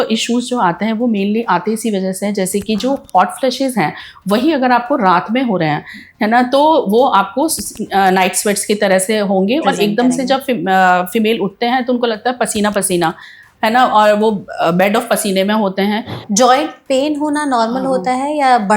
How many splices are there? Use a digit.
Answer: 1